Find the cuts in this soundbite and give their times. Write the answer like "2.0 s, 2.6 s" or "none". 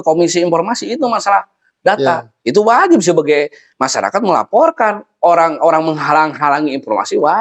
none